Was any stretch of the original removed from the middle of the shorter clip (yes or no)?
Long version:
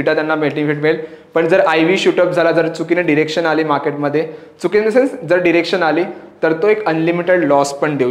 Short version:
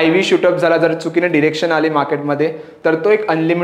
yes